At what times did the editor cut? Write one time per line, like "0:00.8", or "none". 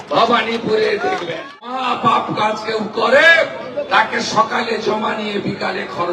0:01.7